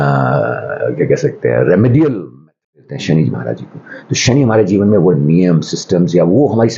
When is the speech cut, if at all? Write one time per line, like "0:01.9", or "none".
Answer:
0:02.9